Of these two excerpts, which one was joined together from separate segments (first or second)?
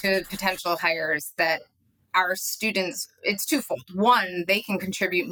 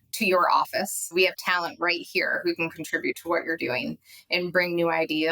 second